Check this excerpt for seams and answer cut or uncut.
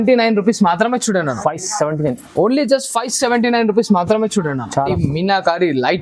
cut